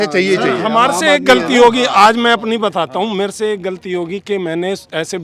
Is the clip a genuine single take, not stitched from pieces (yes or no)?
yes